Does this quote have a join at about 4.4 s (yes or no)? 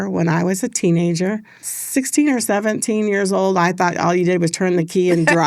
no